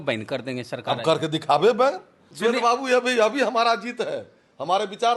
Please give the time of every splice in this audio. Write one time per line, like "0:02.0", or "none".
0:02.2